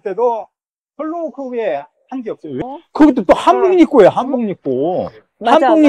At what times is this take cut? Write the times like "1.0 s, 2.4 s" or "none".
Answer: 2.6 s